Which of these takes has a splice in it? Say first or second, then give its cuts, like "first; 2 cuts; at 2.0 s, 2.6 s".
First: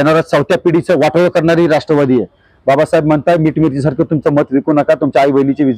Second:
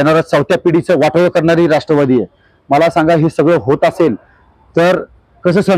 first; 1 cut; at 2.5 s